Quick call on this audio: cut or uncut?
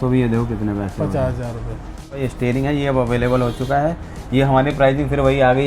cut